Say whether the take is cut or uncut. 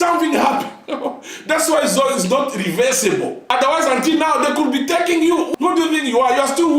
cut